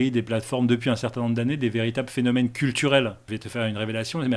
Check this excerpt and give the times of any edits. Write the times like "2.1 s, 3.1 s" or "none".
3.3 s